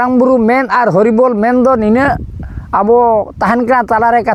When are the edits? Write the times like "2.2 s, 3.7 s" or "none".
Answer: none